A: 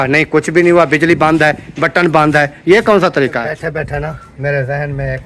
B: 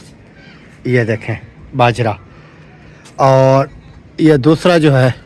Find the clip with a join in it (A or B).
A